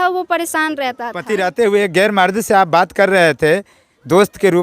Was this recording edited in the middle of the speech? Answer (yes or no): yes